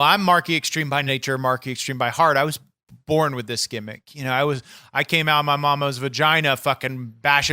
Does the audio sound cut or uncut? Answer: cut